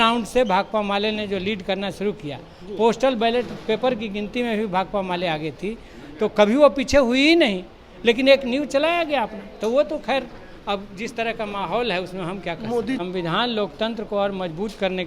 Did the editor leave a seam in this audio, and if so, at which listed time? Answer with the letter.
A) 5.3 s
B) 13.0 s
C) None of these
B